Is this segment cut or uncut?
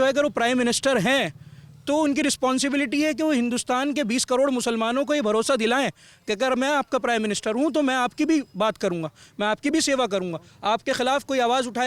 uncut